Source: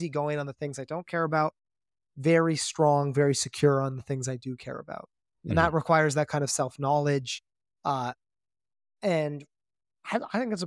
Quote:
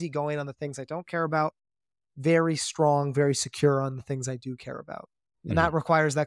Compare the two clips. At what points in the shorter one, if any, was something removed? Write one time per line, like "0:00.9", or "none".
none